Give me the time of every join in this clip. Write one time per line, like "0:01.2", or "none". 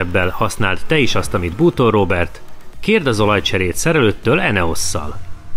none